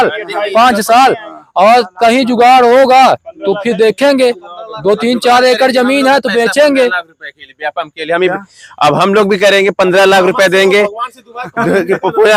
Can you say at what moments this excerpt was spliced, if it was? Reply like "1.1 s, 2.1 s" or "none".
none